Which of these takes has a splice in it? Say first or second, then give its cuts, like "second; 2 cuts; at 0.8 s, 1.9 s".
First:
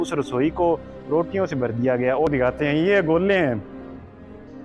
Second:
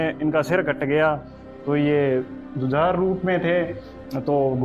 first; 1 cut; at 2.3 s